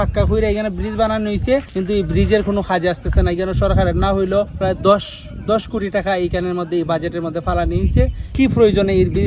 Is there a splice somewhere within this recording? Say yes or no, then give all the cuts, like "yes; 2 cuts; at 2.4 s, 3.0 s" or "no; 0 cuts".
yes; 3 cuts; at 1.7 s, 4.5 s, 8.3 s